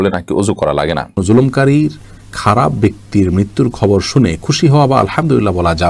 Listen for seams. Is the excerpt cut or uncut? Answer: cut